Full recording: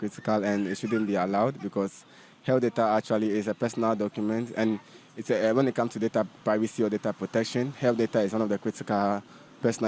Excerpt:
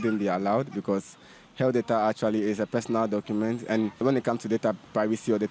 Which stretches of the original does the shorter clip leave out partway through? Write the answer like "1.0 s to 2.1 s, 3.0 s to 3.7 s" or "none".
4.9 s to 5.5 s